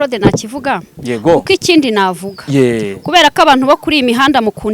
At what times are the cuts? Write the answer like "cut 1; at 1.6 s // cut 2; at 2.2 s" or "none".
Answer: none